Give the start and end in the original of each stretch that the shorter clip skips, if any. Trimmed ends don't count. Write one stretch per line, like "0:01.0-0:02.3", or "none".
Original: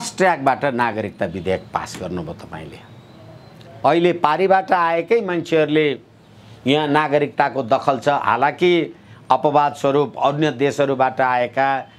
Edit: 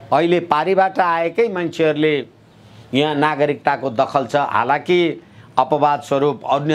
none